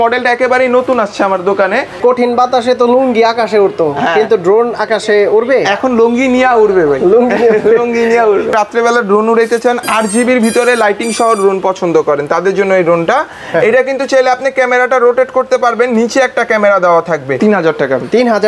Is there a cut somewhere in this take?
yes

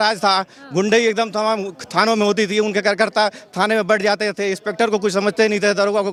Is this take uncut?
yes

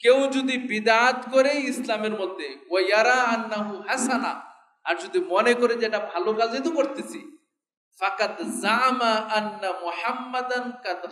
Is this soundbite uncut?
yes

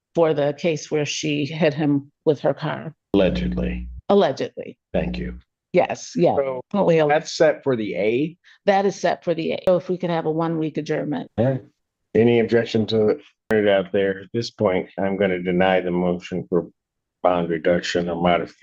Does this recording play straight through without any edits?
no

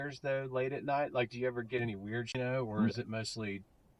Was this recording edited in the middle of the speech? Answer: no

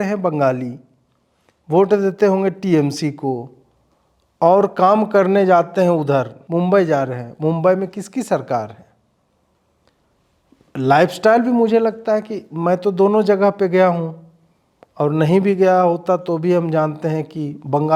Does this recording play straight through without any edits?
yes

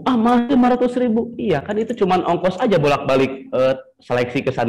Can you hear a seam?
no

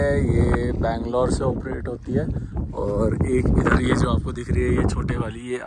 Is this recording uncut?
yes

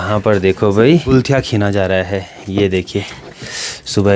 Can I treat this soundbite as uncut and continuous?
yes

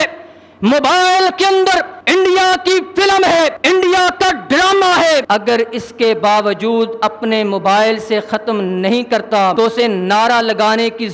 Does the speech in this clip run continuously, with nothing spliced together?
no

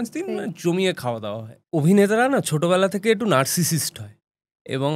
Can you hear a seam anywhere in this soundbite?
yes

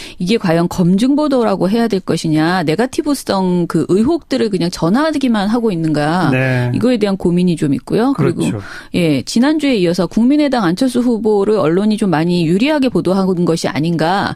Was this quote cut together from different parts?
yes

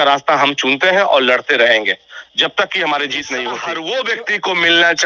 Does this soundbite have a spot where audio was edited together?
yes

